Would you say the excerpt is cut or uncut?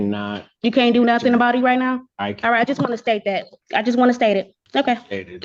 cut